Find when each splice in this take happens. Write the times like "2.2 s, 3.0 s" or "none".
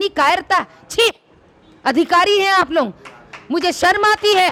none